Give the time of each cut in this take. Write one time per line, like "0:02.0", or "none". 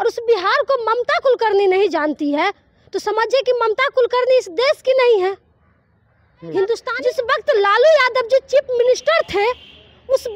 0:06.9